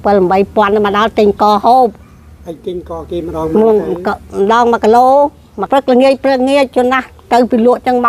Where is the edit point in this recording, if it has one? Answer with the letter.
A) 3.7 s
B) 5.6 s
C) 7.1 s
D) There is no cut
B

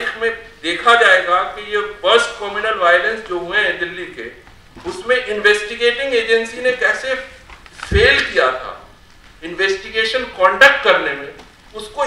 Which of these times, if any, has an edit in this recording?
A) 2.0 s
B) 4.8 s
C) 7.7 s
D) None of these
D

